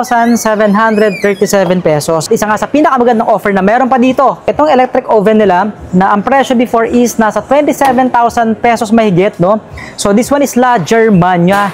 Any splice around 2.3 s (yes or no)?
yes